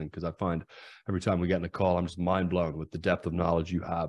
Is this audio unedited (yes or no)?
yes